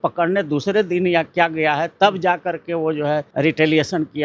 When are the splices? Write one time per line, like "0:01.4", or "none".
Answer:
0:03.3